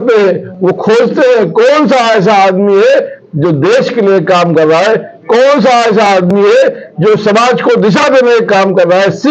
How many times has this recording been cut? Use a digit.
0